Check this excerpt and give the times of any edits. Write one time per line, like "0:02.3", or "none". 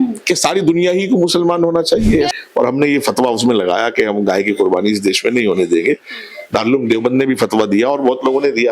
0:02.3